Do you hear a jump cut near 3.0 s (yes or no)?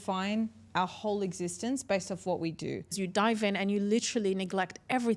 yes